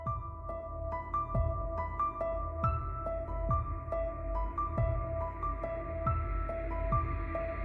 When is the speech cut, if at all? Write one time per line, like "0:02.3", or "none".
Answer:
none

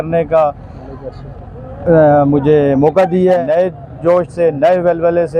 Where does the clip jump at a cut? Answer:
0:03.4

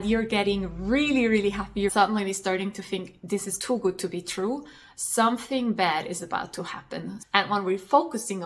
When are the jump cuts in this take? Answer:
0:01.9
0:07.2

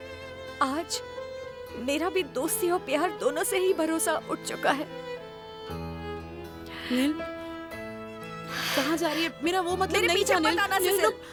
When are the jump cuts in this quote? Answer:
none

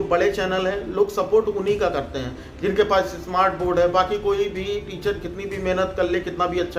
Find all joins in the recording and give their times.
none

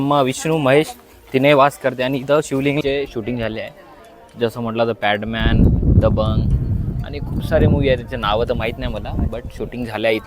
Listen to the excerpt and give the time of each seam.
0:02.8

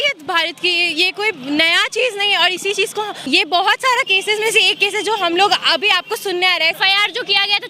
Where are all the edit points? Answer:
0:03.2
0:06.8

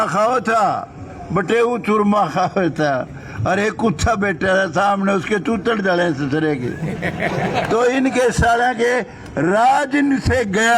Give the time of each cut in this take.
none

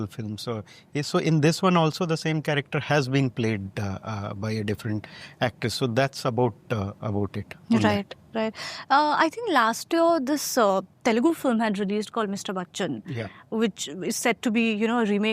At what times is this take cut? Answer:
none

